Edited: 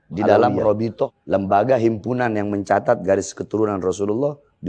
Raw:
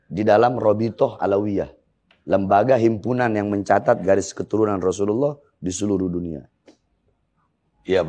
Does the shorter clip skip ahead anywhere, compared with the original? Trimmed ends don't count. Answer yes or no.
yes